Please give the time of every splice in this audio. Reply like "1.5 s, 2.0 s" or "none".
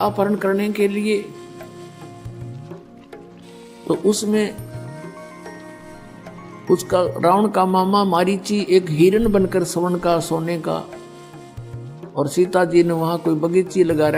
none